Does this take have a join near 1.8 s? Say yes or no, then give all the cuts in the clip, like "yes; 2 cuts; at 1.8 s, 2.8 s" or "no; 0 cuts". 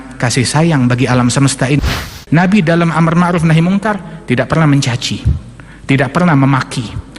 yes; 1 cut; at 1.8 s